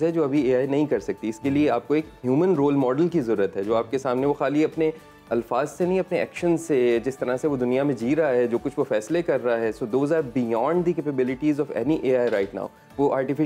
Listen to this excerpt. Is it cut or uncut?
uncut